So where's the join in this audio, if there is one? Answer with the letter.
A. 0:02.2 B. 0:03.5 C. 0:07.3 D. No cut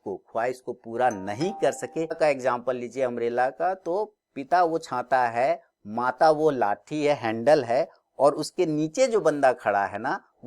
A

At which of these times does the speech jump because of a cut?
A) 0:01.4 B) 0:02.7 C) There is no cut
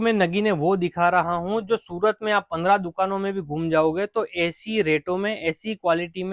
C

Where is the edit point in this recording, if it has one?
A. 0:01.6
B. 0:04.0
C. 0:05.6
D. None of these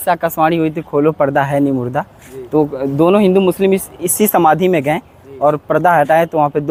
D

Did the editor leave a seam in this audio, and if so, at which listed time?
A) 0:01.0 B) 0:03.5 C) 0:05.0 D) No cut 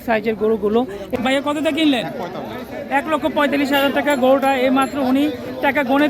A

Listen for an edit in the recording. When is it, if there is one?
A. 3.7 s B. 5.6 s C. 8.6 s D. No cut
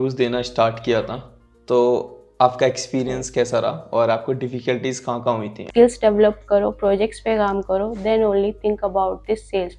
B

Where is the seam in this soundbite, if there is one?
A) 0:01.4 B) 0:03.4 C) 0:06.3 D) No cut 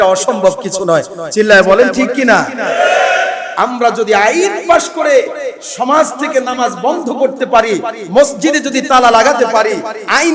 B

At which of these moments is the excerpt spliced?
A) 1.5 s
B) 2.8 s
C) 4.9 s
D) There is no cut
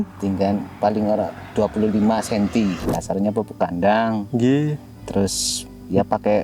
B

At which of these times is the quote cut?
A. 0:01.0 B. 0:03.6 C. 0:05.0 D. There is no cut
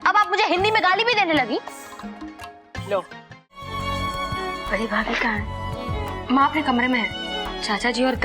B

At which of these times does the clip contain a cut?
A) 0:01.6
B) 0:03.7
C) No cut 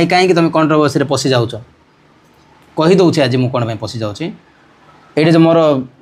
C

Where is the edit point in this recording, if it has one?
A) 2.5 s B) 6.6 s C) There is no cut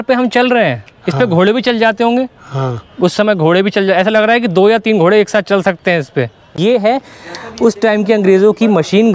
B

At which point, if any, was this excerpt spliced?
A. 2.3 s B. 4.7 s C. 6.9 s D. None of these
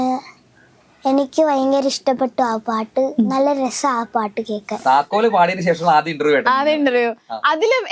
B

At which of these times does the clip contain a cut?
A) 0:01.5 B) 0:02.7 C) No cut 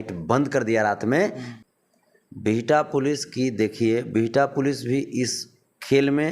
A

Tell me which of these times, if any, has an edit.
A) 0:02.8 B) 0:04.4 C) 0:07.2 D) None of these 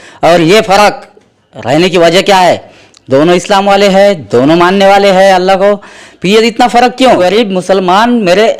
C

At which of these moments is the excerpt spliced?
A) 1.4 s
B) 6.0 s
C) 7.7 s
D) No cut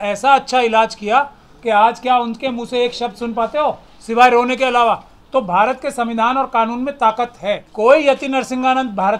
C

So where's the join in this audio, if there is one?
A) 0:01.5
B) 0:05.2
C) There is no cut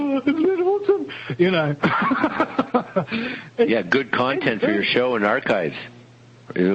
B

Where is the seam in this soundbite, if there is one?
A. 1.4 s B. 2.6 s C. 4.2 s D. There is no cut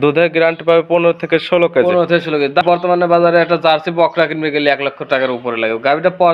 B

